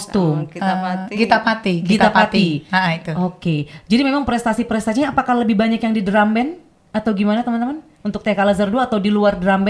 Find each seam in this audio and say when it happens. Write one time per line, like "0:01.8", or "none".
none

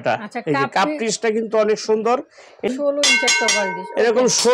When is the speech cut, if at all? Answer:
0:02.7

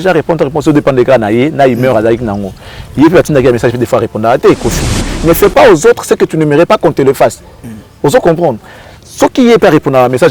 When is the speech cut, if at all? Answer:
0:05.0

